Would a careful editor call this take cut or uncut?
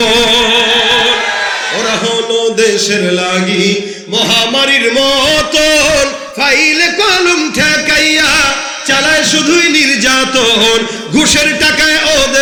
uncut